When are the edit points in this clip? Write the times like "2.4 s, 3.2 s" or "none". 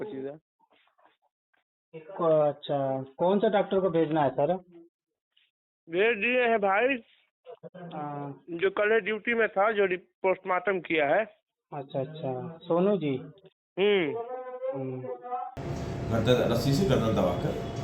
15.6 s